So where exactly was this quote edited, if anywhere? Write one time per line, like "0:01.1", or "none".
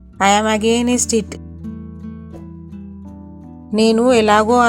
0:01.7
0:03.3